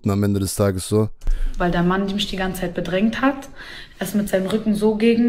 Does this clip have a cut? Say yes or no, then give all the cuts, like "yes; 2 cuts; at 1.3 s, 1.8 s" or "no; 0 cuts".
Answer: no; 0 cuts